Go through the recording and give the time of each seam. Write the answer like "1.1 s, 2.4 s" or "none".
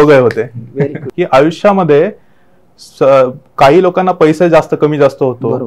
1.0 s